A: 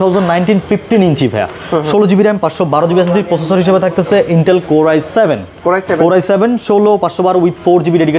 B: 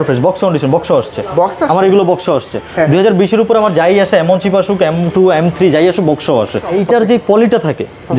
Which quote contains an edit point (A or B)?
B